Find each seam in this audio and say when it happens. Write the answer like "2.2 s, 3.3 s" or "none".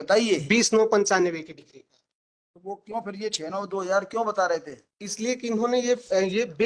none